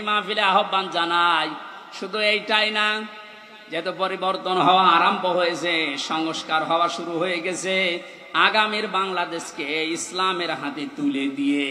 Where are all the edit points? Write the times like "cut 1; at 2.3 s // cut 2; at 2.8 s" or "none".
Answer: none